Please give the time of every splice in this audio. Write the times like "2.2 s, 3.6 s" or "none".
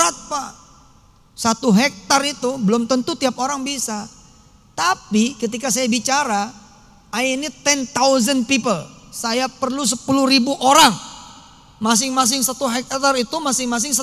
none